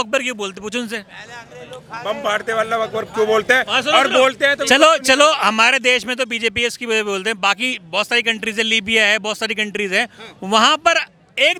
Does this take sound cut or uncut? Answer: uncut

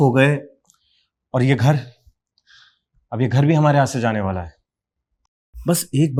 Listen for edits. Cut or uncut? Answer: uncut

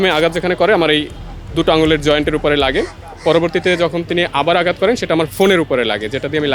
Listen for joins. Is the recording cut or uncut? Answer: uncut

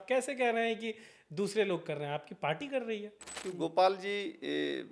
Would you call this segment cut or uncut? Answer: cut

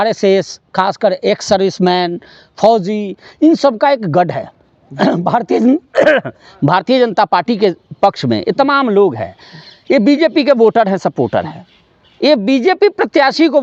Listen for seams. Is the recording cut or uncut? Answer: uncut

